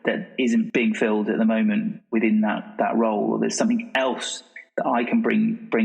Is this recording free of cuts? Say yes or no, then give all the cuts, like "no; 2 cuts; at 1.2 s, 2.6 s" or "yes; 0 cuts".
yes; 0 cuts